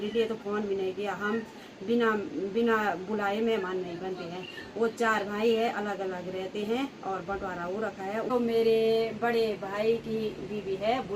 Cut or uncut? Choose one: cut